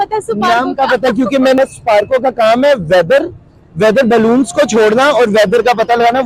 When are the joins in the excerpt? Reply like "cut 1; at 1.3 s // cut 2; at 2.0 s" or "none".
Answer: cut 1; at 1.6 s